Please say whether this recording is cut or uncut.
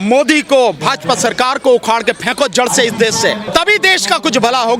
cut